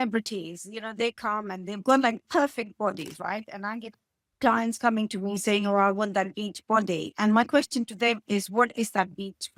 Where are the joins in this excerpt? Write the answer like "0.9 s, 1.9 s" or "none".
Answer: none